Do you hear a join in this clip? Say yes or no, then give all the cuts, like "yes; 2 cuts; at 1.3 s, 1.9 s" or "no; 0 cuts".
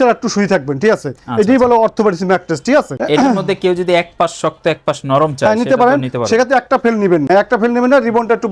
no; 0 cuts